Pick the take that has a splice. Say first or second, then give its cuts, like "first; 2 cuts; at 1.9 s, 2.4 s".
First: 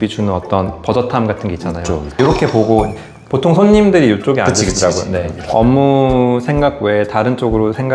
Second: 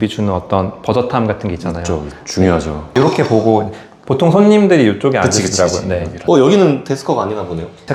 first; 2 cuts; at 2.1 s, 5.4 s